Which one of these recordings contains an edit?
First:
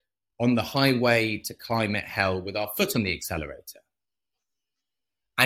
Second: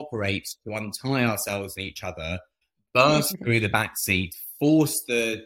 second; 1 cut; at 2.6 s

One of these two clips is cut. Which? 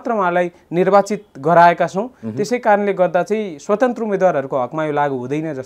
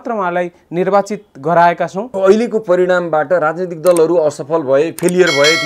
second; 1 cut; at 2.0 s

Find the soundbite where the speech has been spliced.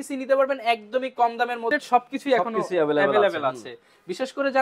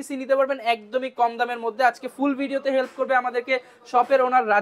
first; 1 cut; at 1.7 s

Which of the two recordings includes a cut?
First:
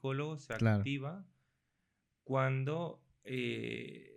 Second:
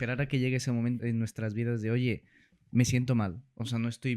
second; 1 cut; at 1.0 s

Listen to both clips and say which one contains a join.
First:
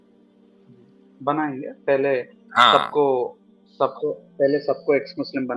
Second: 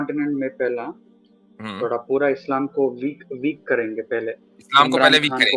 first; 1 cut; at 1.1 s

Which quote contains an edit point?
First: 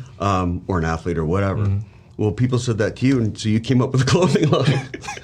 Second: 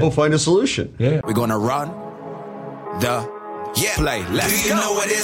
second; 1 cut; at 1.2 s

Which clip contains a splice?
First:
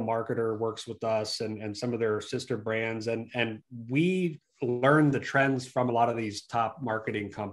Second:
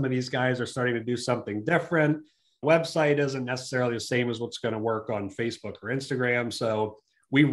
second; 1 cut; at 2.5 s

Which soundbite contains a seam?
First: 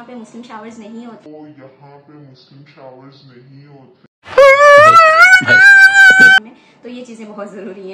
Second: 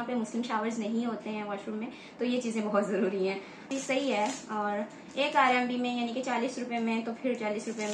second; 2 cuts; at 1.8 s, 3.7 s

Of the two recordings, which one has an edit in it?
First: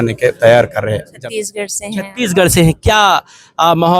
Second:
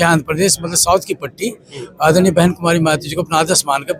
first; 1 cut; at 1.1 s

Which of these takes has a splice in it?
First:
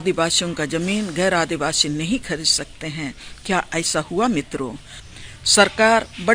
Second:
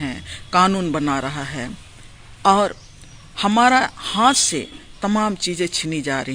first; 1 cut; at 4.9 s

